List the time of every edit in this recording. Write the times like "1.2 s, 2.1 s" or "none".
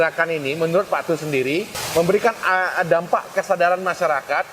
1.8 s